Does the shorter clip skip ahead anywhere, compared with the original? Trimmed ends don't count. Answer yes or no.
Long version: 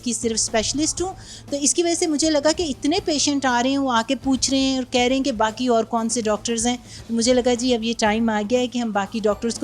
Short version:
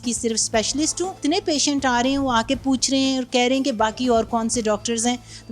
yes